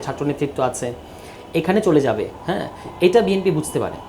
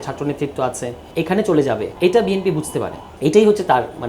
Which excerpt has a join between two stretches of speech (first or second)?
second